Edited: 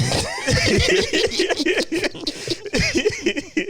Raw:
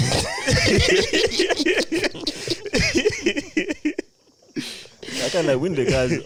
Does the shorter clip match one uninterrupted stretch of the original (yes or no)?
yes